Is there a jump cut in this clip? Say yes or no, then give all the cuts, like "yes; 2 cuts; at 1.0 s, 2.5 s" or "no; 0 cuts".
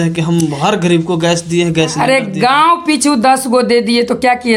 no; 0 cuts